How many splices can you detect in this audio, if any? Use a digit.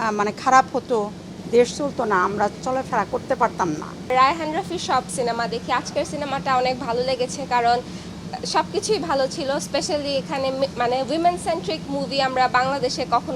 1